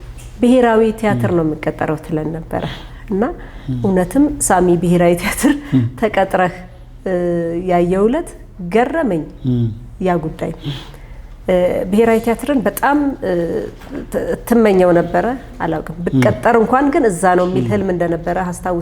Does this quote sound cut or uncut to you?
uncut